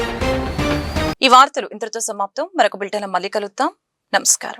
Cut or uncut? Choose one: uncut